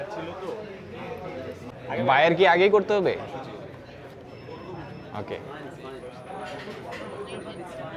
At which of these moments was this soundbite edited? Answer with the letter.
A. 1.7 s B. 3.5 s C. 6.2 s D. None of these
A